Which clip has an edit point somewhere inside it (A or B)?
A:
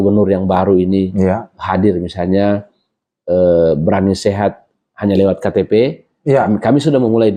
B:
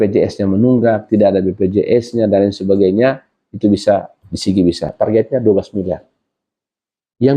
B